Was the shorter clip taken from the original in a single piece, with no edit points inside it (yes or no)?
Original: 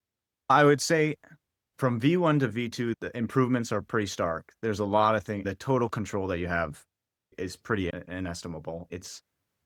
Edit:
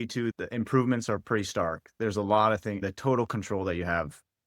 yes